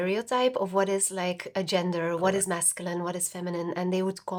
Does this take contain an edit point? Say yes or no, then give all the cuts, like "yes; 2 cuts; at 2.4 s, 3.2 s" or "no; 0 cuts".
no; 0 cuts